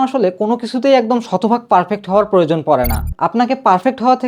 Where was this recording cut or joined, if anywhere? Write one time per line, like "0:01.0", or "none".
0:03.1